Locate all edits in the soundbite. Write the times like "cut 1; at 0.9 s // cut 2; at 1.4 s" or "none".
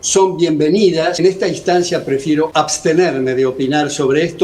cut 1; at 1.2 s // cut 2; at 2.5 s